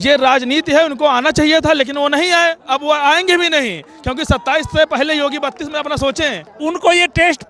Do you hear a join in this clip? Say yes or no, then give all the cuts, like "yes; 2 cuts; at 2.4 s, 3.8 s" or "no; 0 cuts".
yes; 1 cut; at 6.5 s